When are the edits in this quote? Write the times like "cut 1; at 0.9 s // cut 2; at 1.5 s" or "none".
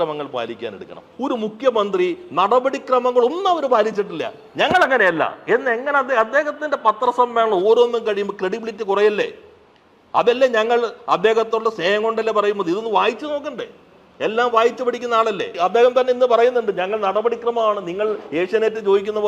cut 1; at 1.1 s // cut 2; at 15.5 s